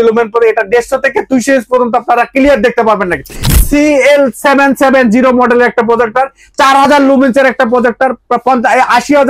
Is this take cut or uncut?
cut